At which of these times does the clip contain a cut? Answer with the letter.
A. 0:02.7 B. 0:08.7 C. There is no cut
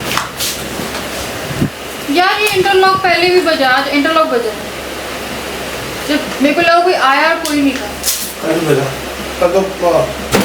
C